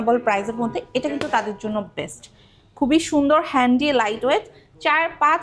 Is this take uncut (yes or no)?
yes